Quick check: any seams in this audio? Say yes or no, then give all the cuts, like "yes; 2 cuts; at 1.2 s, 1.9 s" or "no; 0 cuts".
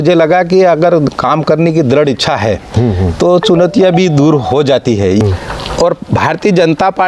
yes; 1 cut; at 5.2 s